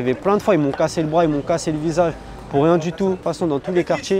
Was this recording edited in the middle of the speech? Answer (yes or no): yes